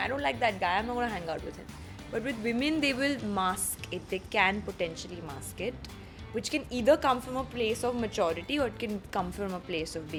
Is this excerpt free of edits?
yes; 0 cuts

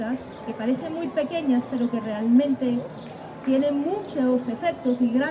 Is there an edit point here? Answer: no; 0 cuts

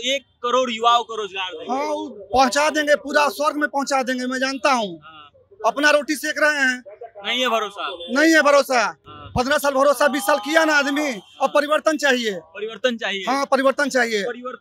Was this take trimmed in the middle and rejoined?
no; 0 cuts

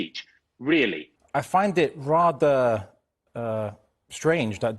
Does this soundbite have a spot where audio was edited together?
yes; 1 cut; at 1.1 s

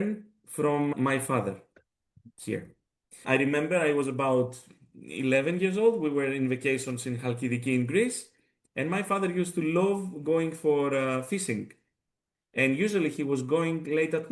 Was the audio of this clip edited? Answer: no; 0 cuts

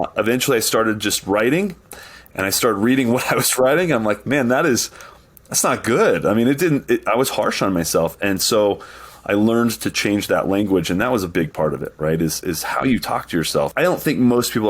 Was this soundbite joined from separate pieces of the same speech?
yes; 1 cut; at 13.7 s

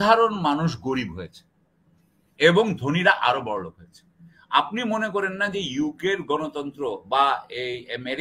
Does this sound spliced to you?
no; 0 cuts

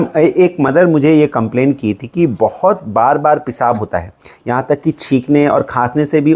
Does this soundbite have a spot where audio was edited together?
no; 0 cuts

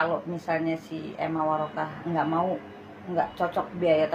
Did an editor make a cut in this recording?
no; 0 cuts

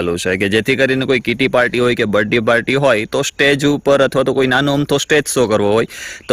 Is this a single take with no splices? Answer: yes; 0 cuts

